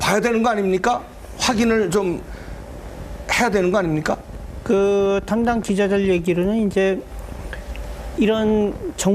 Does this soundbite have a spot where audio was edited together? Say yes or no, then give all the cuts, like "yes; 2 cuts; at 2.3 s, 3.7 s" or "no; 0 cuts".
no; 0 cuts